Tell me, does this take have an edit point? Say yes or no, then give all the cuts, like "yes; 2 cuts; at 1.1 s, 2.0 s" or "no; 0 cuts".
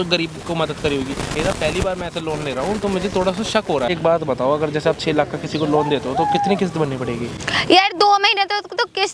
yes; 2 cuts; at 1.3 s, 3.9 s